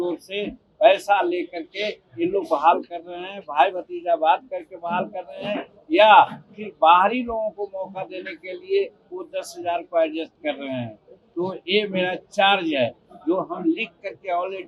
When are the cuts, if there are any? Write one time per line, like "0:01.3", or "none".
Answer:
none